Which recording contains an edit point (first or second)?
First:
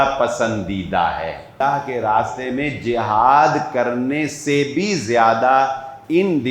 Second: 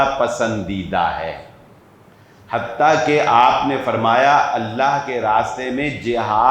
first